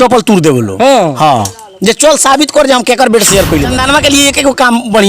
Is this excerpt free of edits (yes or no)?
no